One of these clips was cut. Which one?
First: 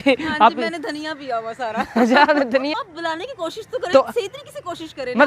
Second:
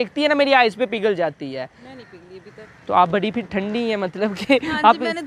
first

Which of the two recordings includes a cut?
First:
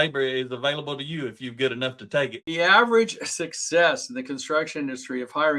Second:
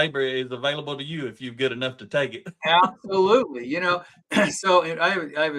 first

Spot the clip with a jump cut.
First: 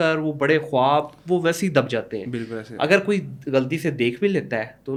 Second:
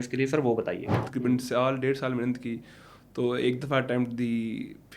second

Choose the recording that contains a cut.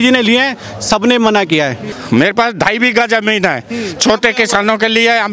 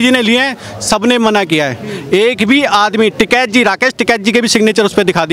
first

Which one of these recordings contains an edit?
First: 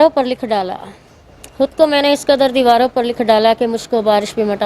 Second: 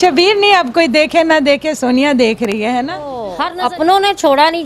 second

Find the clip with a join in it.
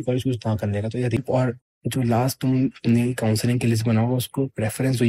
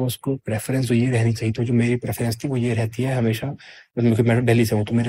first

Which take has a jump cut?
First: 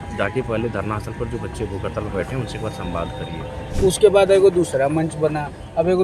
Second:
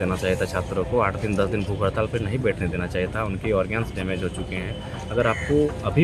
first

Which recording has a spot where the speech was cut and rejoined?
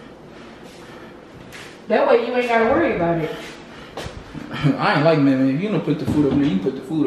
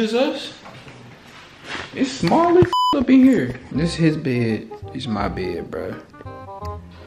second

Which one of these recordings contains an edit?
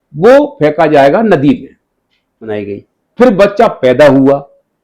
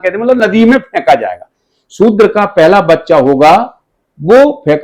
first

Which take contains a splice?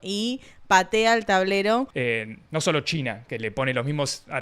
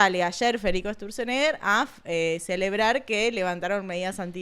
first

